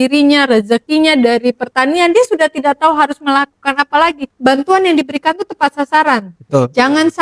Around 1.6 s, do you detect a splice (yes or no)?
no